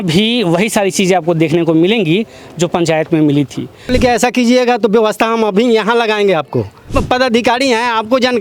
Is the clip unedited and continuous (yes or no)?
no